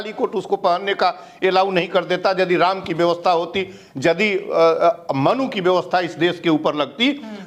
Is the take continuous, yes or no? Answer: yes